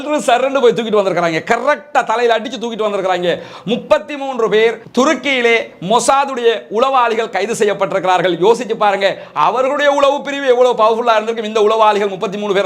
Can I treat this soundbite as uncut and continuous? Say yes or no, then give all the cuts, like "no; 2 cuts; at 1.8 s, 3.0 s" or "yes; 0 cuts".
yes; 0 cuts